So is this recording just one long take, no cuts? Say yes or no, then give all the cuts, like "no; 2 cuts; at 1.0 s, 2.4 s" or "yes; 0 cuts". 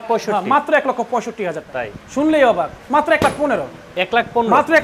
no; 1 cut; at 1.7 s